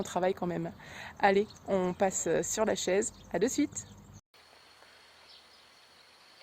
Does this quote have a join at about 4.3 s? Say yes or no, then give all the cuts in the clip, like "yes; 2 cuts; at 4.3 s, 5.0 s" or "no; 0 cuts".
yes; 1 cut; at 4.3 s